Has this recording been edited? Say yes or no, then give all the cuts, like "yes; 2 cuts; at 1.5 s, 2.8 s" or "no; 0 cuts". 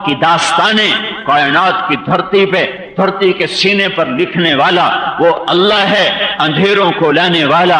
no; 0 cuts